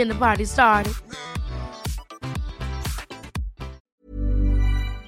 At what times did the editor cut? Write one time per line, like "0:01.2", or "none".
0:03.9